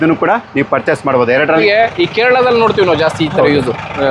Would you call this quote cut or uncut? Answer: cut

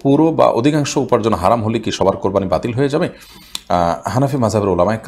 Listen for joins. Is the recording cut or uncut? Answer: uncut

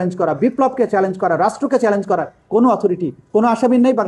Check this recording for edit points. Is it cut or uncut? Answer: uncut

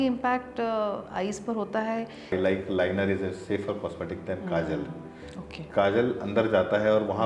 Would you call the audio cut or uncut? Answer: cut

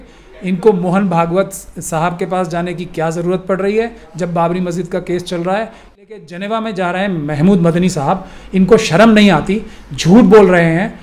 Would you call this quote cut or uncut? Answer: cut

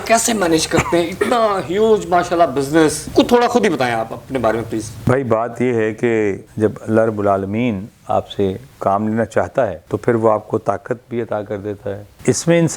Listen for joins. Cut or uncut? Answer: uncut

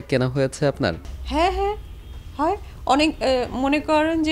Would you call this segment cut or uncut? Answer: uncut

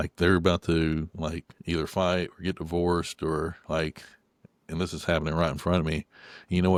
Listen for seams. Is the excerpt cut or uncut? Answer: uncut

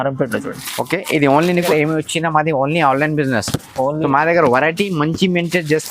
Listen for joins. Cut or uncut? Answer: cut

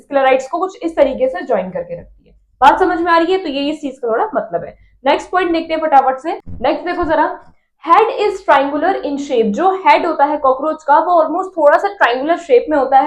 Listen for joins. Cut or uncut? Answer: uncut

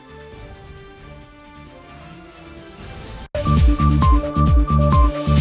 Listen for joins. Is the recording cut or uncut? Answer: cut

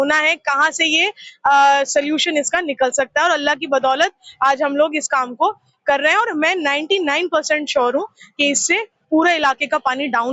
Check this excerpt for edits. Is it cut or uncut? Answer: uncut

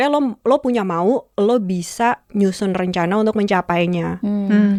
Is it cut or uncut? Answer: uncut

